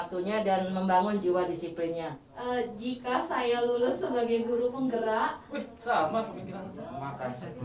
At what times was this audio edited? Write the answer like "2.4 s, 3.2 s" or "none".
2.3 s